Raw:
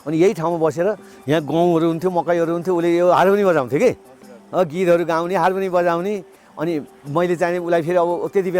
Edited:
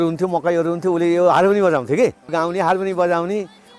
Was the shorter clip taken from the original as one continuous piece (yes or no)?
no